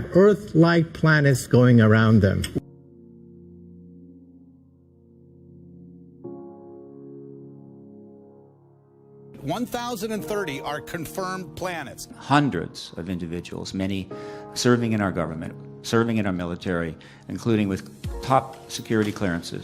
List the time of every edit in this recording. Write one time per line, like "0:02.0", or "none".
0:02.6